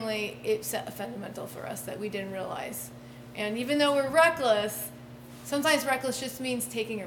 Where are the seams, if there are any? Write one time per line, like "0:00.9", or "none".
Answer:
none